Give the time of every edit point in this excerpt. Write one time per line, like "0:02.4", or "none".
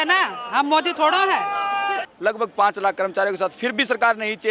0:02.1